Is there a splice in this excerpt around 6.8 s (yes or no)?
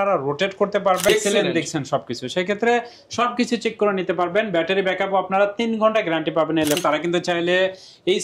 yes